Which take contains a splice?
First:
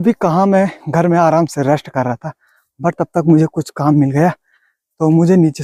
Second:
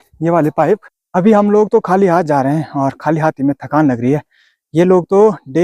second; 1 cut; at 1.0 s

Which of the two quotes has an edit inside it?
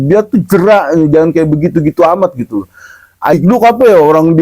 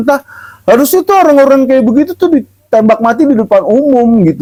first; 1 cut; at 3.3 s

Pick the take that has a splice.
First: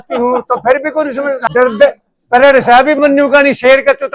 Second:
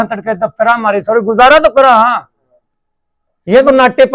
first; 1 cut; at 1.4 s

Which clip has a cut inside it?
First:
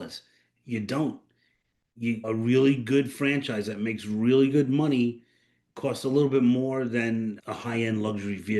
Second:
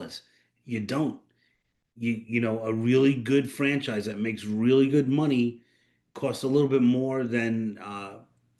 first; 2 cuts; at 2.2 s, 7.4 s

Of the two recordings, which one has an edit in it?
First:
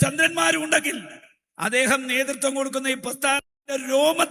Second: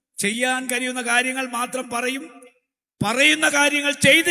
first; 1 cut; at 2.1 s

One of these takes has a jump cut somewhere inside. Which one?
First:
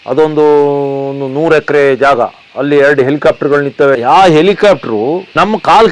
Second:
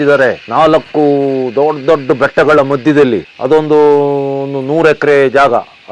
first; 1 cut; at 4.0 s

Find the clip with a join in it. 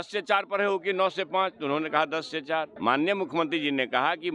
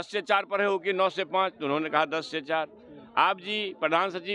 first; 1 cut; at 2.7 s

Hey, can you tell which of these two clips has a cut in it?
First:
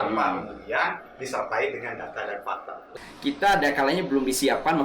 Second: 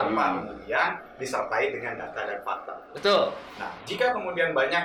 first; 1 cut; at 2.9 s

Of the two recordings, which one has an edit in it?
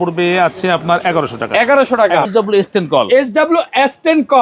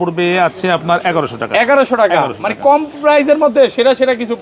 first; 1 cut; at 2.3 s

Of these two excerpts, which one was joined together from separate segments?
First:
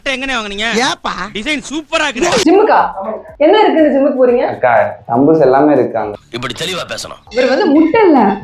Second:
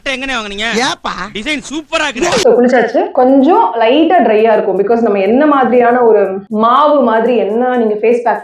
first; 2 cuts; at 2.4 s, 7.2 s

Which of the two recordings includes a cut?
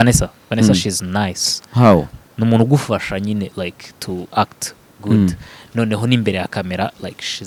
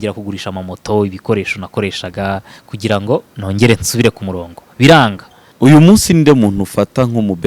second; 1 cut; at 5.5 s

